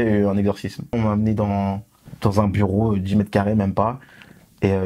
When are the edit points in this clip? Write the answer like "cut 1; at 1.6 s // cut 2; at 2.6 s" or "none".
cut 1; at 0.9 s